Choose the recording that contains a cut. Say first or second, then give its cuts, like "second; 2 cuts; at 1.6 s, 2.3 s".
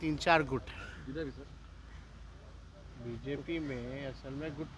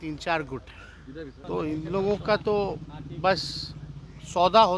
second; 1 cut; at 1.4 s